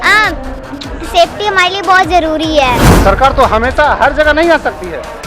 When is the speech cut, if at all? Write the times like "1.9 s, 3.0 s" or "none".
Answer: 2.9 s